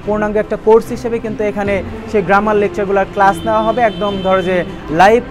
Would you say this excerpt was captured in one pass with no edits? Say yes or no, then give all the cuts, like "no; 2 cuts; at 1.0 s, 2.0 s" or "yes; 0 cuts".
yes; 0 cuts